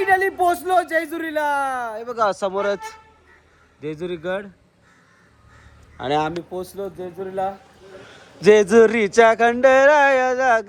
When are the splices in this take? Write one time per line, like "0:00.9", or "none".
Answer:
none